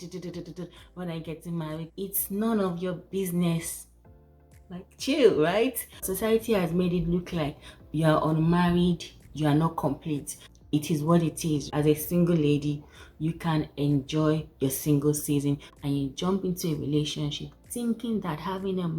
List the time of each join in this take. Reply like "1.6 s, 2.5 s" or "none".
6.0 s, 10.3 s, 11.7 s, 15.7 s